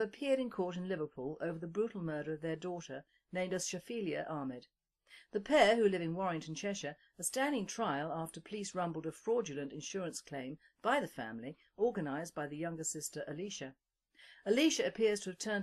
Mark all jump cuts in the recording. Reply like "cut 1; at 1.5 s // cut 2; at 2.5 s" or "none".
none